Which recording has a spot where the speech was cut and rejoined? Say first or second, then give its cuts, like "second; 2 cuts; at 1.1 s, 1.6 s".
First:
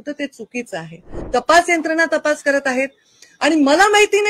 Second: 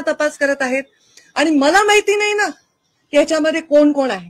first; 1 cut; at 1.1 s